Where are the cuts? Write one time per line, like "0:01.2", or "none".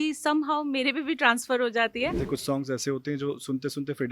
0:02.2